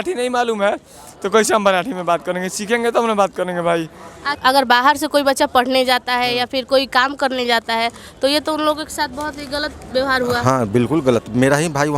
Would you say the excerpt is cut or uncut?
cut